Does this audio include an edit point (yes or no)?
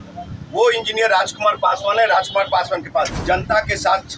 yes